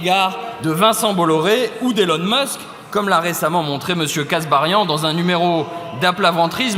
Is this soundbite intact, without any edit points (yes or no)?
yes